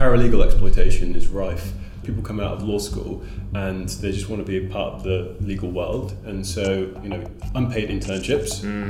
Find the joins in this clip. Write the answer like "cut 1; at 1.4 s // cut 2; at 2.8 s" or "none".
cut 1; at 2.0 s